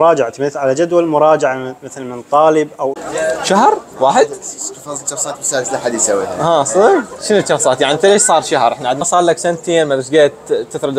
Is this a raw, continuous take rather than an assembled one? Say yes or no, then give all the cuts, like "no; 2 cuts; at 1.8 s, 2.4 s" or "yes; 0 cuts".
no; 3 cuts; at 3.0 s, 7.2 s, 9.0 s